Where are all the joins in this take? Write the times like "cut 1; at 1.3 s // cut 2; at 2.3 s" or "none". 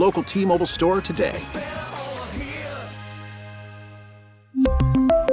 none